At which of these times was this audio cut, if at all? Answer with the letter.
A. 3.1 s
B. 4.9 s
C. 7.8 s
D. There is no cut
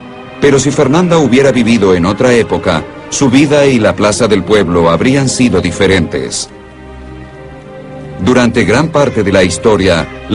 C